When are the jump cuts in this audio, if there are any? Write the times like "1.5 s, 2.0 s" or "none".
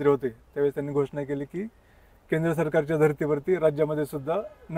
none